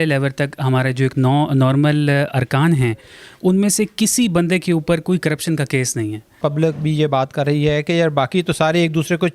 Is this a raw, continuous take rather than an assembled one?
no; 1 cut; at 6.3 s

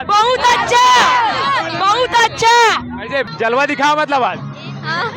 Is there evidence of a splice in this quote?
yes; 1 cut; at 3.3 s

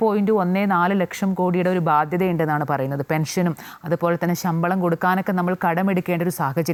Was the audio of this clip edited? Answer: no; 0 cuts

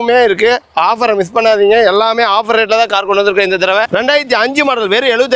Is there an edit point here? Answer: yes; 1 cut; at 3.8 s

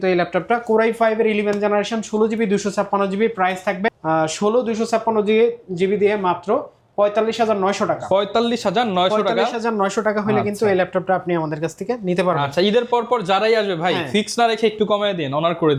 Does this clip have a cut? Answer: no; 0 cuts

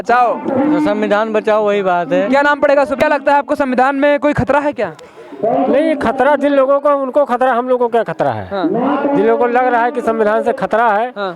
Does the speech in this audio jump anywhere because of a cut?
yes; 1 cut; at 3.0 s

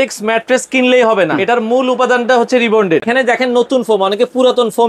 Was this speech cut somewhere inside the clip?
yes; 2 cuts; at 1.4 s, 3.1 s

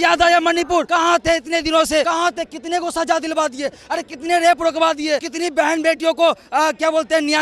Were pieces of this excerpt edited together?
yes; 3 cuts; at 0.9 s, 2.1 s, 5.3 s

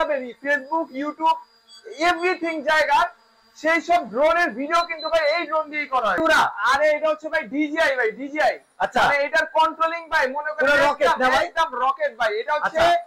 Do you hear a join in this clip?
yes; 1 cut; at 6.2 s

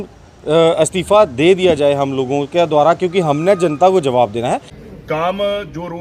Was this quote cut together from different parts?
yes; 1 cut; at 4.7 s

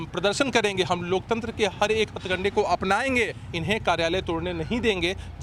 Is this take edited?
yes; 1 cut; at 3.4 s

